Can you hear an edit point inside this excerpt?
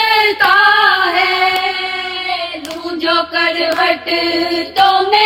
no; 0 cuts

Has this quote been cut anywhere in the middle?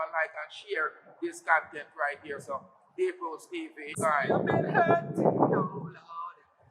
yes; 1 cut; at 4.1 s

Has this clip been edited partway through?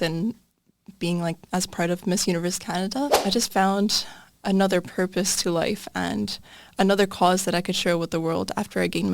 yes; 1 cut; at 3.2 s

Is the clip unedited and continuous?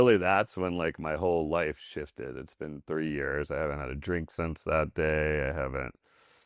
yes; 0 cuts

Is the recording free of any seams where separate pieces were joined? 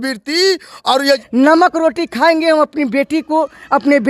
no; 1 cut; at 1.0 s

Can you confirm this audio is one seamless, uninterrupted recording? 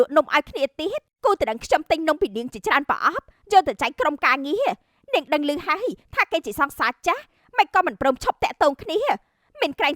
yes; 0 cuts

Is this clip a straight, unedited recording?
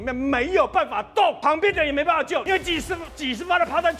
no; 2 cuts; at 1.4 s, 2.4 s

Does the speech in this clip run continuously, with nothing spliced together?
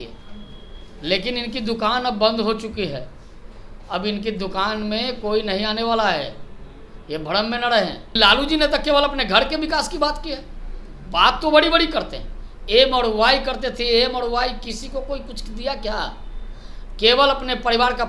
no; 1 cut; at 8.1 s

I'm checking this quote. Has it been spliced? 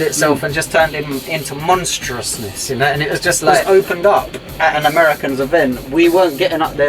yes; 1 cut; at 3.6 s

